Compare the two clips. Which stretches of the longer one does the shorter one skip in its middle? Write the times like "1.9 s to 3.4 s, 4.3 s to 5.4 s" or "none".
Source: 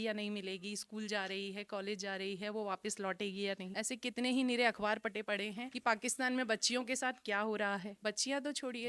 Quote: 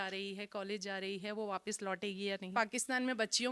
3.6 s to 5.8 s